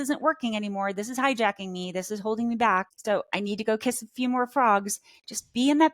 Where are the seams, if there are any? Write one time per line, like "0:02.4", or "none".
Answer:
0:02.9